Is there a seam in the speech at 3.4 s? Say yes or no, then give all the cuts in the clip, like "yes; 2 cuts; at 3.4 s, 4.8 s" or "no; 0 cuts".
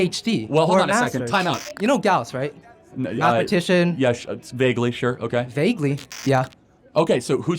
no; 2 cuts; at 1.7 s, 6.2 s